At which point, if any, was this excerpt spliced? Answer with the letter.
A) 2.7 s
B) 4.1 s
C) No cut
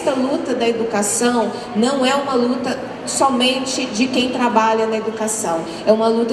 C